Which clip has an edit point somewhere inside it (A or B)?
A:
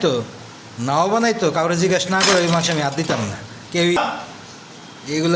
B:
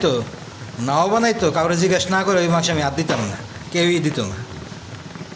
A